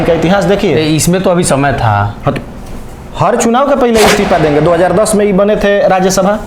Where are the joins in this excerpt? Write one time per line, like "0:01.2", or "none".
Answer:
none